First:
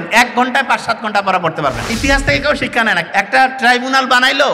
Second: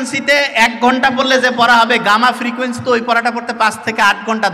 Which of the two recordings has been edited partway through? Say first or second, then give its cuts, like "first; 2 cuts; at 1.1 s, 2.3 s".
first; 2 cuts; at 1.9 s, 3.0 s